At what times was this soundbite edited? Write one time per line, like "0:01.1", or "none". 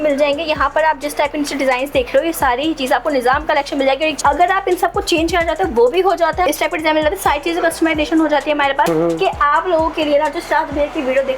0:04.2
0:06.5
0:08.9